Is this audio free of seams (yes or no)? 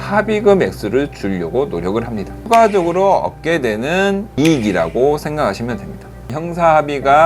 no